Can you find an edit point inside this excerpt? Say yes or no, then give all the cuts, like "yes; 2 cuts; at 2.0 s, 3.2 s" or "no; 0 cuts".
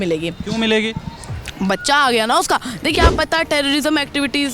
yes; 1 cut; at 2.9 s